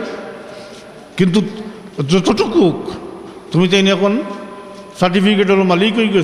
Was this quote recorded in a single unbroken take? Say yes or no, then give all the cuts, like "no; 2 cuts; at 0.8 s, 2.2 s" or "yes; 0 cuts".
yes; 0 cuts